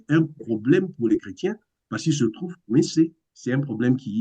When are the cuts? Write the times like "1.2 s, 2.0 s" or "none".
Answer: 3.3 s